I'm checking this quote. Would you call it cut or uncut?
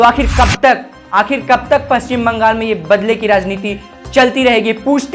uncut